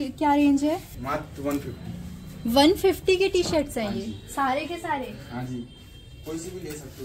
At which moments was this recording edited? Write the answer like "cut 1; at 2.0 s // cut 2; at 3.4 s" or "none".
cut 1; at 0.9 s